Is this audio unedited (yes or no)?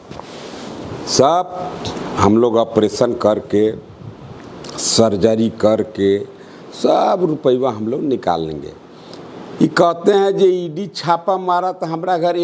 yes